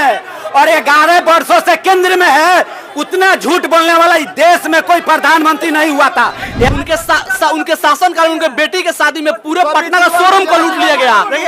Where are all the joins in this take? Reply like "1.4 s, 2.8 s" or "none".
6.7 s